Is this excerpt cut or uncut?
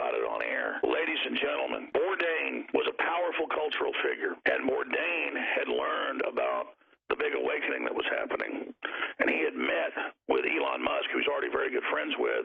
cut